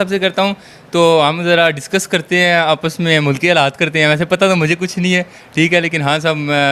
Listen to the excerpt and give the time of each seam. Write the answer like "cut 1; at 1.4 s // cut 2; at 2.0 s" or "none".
none